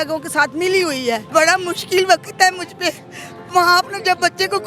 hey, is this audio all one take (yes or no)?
no